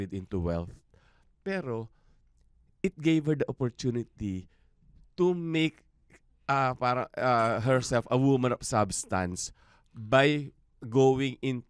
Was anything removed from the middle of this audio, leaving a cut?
no; 0 cuts

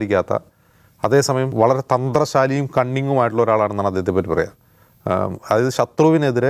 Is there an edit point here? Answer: yes; 1 cut; at 1.5 s

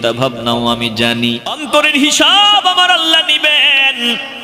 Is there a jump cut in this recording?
yes; 1 cut; at 1.5 s

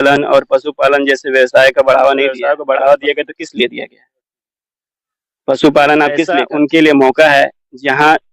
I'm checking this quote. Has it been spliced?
yes; 2 cuts; at 2.4 s, 6.4 s

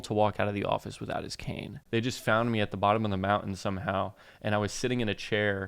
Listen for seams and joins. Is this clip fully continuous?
no; 1 cut; at 1.7 s

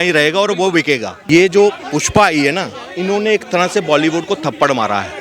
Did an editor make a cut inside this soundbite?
yes; 1 cut; at 1.1 s

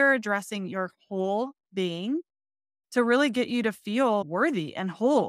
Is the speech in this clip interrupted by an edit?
yes; 1 cut; at 4.2 s

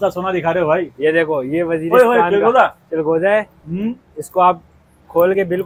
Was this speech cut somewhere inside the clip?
no; 0 cuts

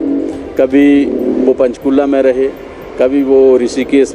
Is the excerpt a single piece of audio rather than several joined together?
yes; 0 cuts

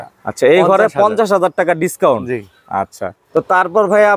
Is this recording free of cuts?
yes; 0 cuts

